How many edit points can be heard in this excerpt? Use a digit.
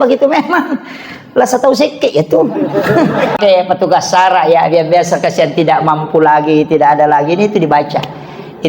1